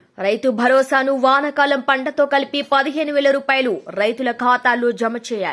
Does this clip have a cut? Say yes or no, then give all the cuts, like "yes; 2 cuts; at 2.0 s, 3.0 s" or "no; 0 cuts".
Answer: no; 0 cuts